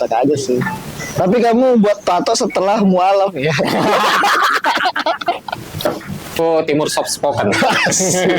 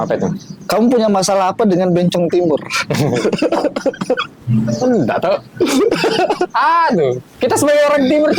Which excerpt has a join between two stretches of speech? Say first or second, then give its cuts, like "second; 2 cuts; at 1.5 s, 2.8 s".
first; 1 cut; at 6.4 s